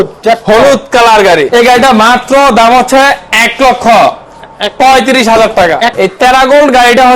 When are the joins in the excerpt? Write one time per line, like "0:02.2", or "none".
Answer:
0:01.5
0:06.0